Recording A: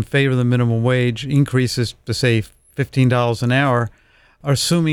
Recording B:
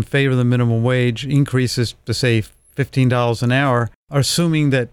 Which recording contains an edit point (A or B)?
B